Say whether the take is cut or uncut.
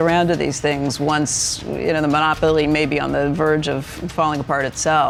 uncut